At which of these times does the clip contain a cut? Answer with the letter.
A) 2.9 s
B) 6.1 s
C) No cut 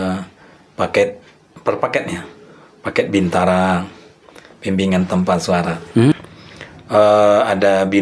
B